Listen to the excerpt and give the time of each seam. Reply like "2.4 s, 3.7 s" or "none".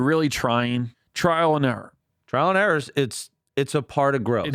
1.0 s

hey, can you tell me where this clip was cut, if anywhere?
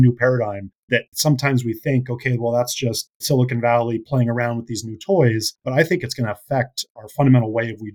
5.5 s

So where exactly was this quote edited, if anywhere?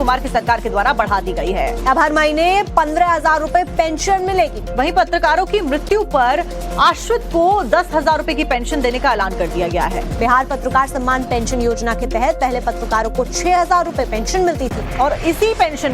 13.8 s

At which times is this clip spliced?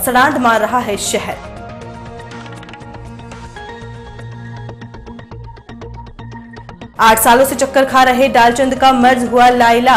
1.4 s, 6.9 s

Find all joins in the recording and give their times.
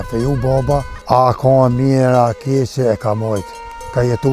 0.9 s

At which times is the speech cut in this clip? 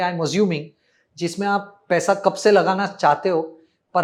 none

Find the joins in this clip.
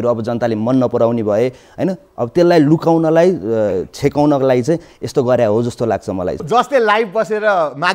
6.3 s

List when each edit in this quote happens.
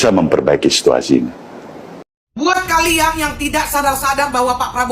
2.3 s

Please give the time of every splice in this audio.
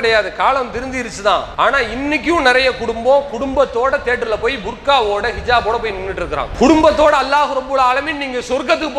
1.5 s, 6.5 s

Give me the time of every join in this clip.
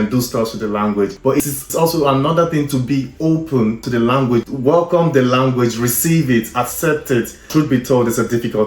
7.4 s

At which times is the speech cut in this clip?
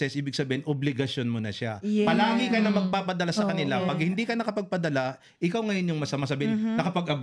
none

